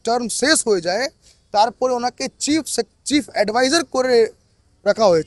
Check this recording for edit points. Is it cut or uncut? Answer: uncut